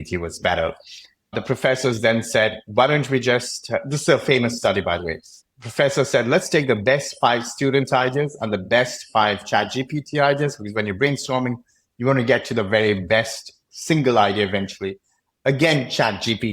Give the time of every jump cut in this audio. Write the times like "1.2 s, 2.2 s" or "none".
1.3 s